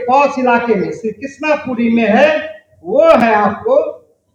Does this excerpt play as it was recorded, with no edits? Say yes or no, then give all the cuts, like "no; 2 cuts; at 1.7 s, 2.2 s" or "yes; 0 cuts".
yes; 0 cuts